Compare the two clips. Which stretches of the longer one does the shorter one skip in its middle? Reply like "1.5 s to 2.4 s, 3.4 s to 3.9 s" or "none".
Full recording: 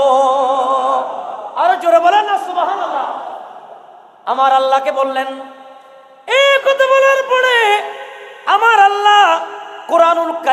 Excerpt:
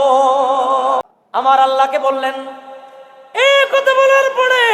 1.2 s to 4.1 s